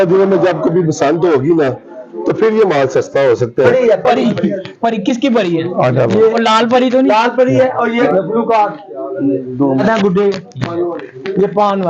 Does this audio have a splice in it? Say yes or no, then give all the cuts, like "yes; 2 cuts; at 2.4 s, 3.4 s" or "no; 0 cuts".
yes; 3 cuts; at 3.7 s, 8.0 s, 9.8 s